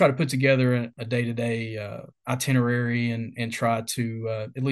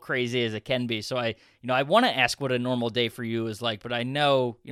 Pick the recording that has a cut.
first; 1 cut; at 0.9 s

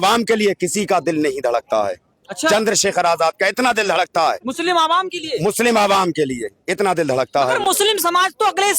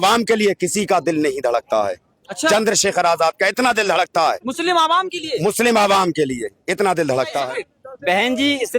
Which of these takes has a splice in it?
second; 1 cut; at 7.4 s

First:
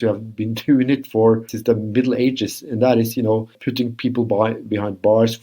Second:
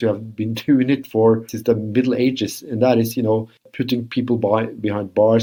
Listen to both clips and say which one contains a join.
first; 1 cut; at 3.6 s

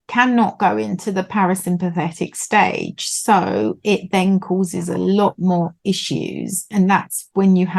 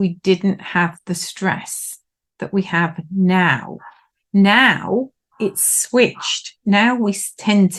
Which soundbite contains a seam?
first; 1 cut; at 6.7 s

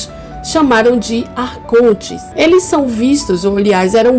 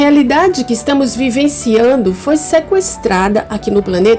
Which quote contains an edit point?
first; 1 cut; at 2.2 s

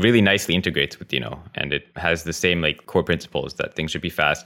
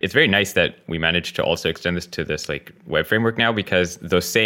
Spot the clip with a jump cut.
first; 2 cuts; at 1.9 s, 2.8 s

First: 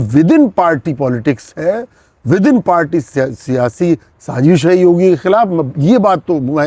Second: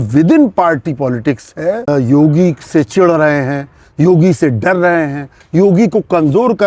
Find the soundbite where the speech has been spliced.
second; 1 cut; at 1.9 s

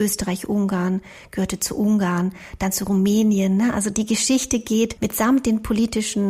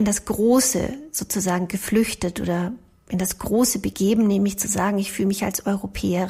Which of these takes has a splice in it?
first; 2 cuts; at 3.9 s, 5.0 s

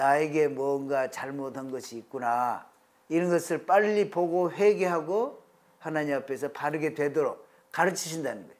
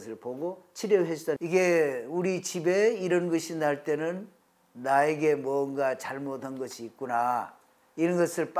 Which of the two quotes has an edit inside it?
second; 1 cut; at 1.4 s

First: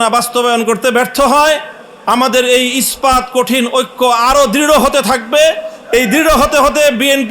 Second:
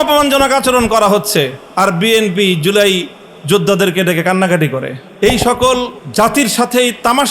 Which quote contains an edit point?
second; 3 cuts; at 1.6 s, 5.0 s, 6.0 s

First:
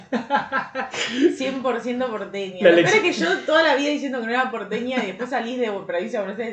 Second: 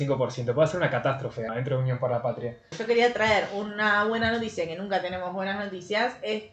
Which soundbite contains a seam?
second; 2 cuts; at 1.5 s, 2.8 s

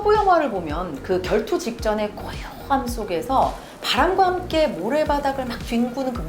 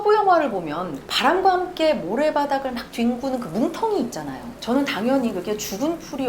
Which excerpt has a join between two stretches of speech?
second; 2 cuts; at 0.9 s, 4.4 s

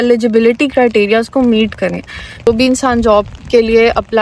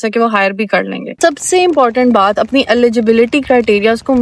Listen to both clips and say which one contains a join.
first; 1 cut; at 2.5 s

